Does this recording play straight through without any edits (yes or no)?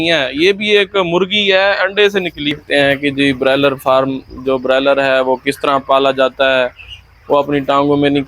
no